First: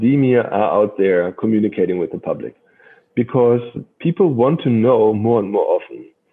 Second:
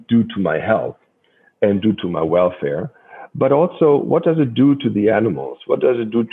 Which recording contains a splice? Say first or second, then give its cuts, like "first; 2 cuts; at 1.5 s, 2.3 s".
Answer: first; 1 cut; at 3.8 s